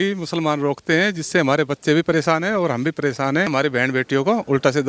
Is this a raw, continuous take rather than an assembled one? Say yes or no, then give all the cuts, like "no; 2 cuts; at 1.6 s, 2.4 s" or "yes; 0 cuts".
no; 1 cut; at 3.5 s